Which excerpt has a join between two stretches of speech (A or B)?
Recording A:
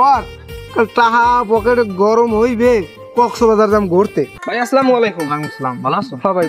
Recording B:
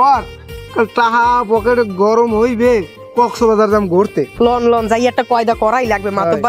A